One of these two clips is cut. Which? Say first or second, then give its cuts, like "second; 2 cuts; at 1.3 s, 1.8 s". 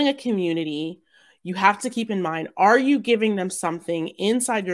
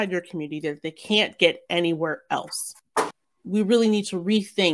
second; 1 cut; at 3.3 s